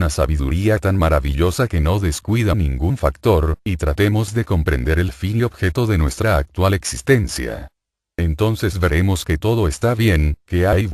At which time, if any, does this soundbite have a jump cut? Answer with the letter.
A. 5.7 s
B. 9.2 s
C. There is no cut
B